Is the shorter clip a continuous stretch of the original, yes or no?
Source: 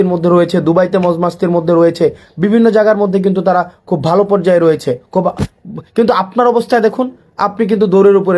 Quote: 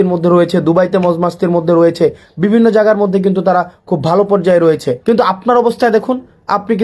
no